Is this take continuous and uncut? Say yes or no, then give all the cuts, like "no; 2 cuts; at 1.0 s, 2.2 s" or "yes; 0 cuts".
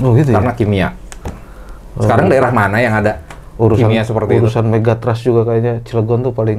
yes; 0 cuts